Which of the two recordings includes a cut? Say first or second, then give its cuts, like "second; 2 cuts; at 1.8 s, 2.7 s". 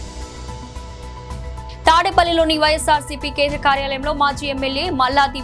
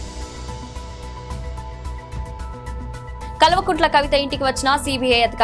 first; 1 cut; at 1.9 s